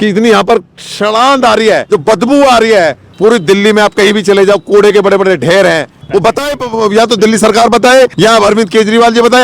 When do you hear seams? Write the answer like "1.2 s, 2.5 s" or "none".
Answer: 1.8 s, 3.0 s, 6.0 s, 8.1 s